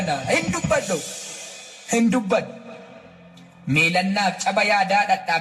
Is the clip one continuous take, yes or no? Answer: yes